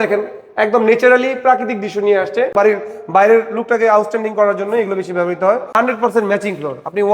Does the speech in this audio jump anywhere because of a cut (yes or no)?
yes